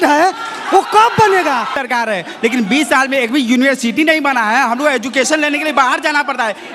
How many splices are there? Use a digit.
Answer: 1